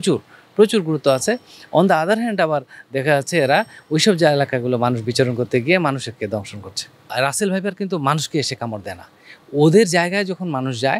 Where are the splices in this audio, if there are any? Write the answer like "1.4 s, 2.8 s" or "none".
none